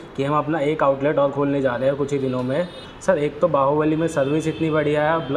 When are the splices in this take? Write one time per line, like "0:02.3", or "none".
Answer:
0:02.8